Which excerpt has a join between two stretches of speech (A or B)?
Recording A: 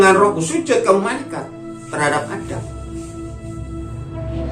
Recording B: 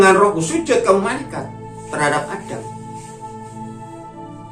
A